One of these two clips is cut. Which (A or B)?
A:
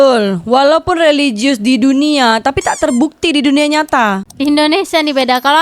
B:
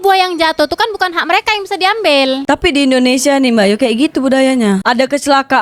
A